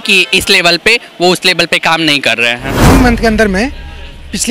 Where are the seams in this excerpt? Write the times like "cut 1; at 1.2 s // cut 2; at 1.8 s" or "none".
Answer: cut 1; at 2.8 s